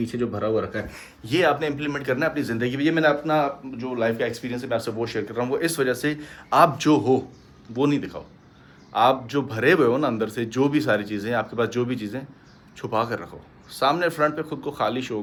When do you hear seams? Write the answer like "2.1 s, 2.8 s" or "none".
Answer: none